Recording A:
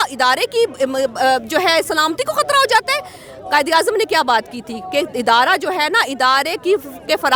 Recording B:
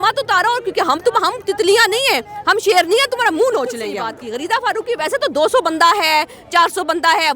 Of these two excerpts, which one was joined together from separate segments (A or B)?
B